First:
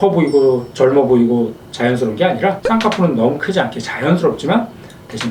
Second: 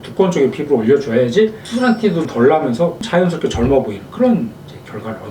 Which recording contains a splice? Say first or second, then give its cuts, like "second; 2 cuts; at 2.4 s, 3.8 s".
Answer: second; 2 cuts; at 1.6 s, 3.0 s